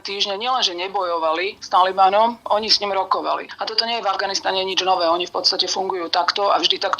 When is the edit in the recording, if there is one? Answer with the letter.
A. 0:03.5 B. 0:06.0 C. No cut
A